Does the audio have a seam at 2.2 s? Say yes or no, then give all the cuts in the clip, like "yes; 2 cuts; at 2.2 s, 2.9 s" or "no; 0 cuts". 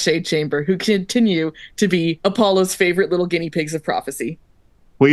yes; 1 cut; at 2.2 s